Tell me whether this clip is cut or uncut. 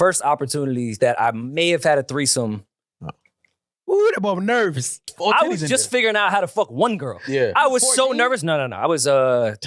cut